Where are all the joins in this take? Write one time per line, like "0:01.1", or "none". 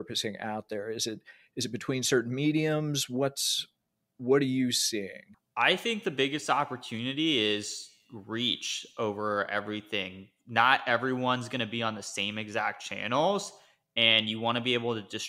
0:05.2